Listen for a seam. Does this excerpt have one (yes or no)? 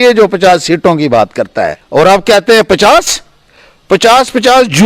yes